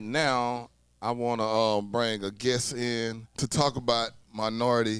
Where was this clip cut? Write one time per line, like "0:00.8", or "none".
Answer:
0:03.2